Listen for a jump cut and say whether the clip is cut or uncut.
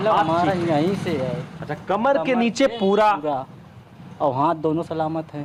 uncut